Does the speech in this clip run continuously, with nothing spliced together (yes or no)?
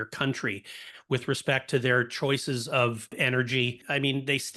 no